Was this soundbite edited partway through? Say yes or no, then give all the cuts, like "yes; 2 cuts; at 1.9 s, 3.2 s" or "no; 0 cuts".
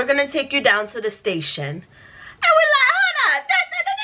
no; 0 cuts